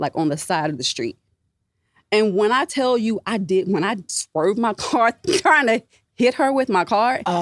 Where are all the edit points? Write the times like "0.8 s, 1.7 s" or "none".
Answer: none